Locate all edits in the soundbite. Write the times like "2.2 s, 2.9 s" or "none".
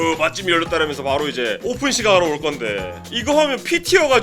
1.6 s, 2.9 s